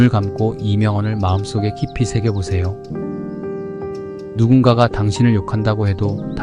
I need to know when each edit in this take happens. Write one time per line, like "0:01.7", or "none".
0:02.8
0:04.1